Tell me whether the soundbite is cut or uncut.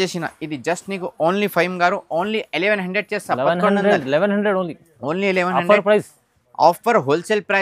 uncut